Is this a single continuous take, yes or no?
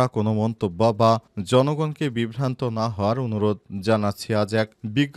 yes